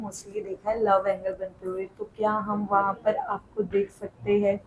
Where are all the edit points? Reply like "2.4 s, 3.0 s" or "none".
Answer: none